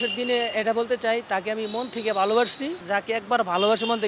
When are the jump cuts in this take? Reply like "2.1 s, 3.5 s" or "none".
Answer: 2.8 s